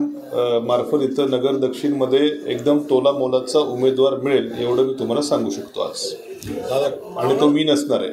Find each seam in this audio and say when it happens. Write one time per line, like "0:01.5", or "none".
none